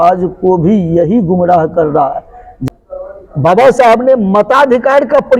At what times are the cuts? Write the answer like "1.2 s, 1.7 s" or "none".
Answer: 2.6 s